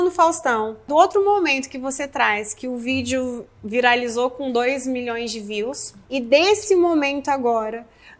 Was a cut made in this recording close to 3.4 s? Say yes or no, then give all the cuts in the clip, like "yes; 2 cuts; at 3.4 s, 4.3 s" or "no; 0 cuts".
no; 2 cuts; at 0.9 s, 5.9 s